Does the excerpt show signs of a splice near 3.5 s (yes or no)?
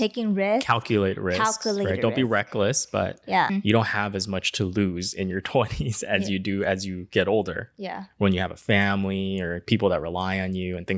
yes